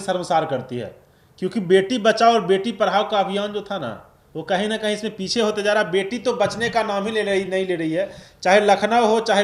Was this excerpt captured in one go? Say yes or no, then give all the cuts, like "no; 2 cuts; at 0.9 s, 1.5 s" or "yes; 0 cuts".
yes; 0 cuts